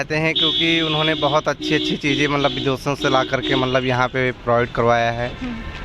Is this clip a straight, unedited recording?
yes; 0 cuts

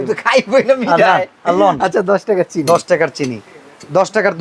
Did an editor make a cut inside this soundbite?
no; 0 cuts

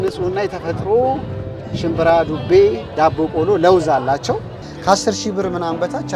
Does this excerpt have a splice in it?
yes; 1 cut; at 4.7 s

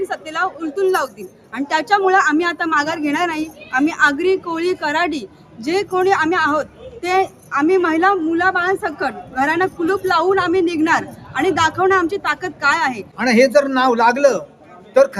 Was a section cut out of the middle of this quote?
yes; 1 cut; at 13.1 s

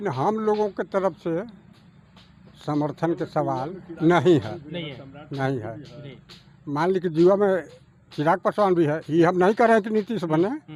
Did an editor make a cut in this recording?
no; 0 cuts

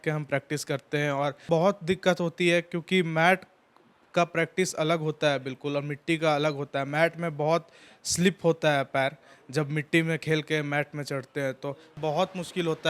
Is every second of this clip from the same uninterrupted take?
no; 2 cuts; at 1.5 s, 12.0 s

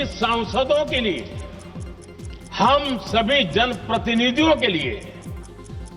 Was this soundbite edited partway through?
no; 0 cuts

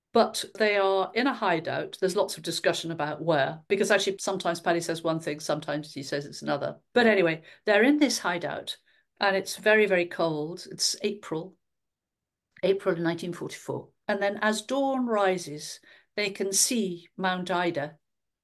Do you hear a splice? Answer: yes; 1 cut; at 4.2 s

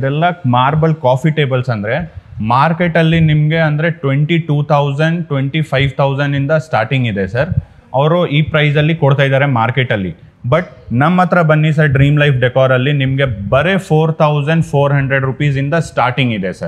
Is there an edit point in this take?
no; 0 cuts

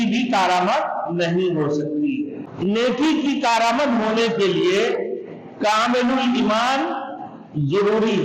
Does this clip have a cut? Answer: yes; 1 cut; at 2.5 s

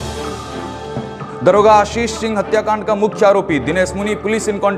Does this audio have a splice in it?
yes; 1 cut; at 1.2 s

